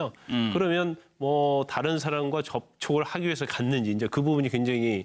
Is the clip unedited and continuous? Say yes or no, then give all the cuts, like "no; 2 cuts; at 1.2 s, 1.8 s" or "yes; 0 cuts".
yes; 0 cuts